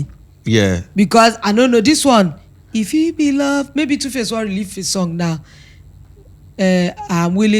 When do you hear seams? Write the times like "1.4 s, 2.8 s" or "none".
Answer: none